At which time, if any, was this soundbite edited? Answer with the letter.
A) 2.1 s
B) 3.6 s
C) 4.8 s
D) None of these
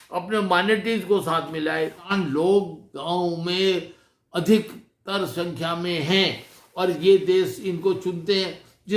A